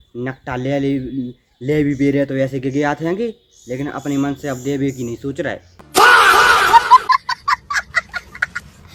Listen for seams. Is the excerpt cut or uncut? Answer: uncut